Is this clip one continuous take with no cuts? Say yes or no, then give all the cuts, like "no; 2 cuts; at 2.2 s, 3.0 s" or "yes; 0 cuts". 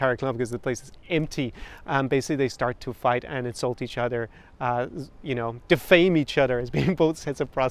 yes; 0 cuts